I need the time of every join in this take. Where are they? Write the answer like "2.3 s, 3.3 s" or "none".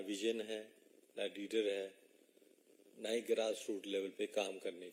none

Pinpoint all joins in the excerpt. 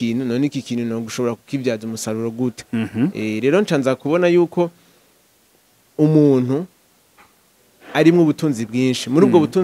none

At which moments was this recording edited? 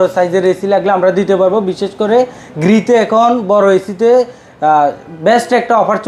none

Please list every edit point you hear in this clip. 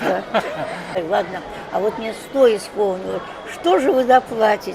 1.0 s

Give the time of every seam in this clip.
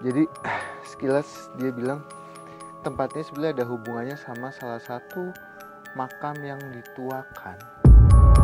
none

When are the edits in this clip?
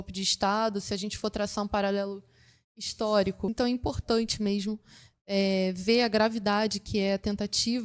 3.5 s

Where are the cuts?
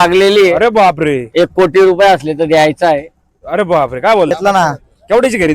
4.3 s

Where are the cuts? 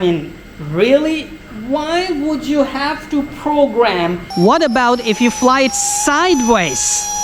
4.2 s

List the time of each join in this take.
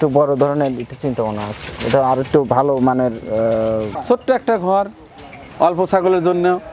4.0 s

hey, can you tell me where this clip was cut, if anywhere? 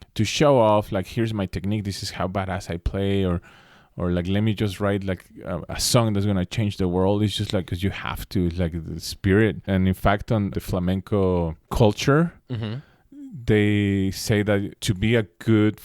7.7 s, 9.6 s, 10.5 s, 11.7 s, 14.8 s

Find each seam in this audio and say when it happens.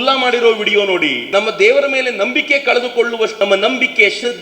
1.2 s, 3.3 s

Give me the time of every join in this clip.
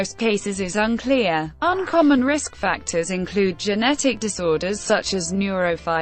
1.5 s

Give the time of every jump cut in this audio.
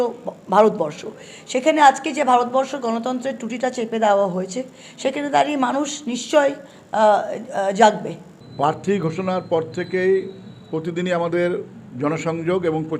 8.4 s

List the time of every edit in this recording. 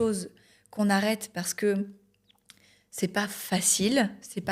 none

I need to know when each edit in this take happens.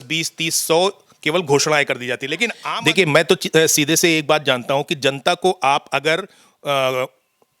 2.6 s

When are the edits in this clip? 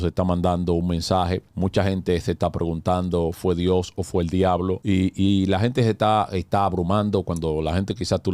1.5 s, 4.8 s

